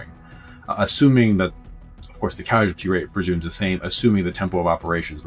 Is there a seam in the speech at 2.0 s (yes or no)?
no